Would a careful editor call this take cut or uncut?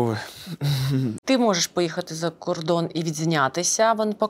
cut